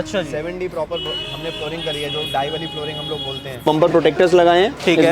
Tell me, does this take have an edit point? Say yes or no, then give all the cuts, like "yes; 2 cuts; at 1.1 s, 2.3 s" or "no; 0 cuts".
yes; 1 cut; at 3.6 s